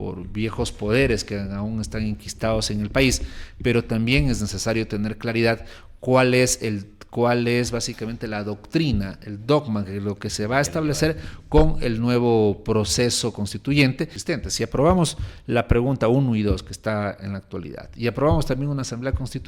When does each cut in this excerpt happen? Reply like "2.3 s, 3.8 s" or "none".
14.2 s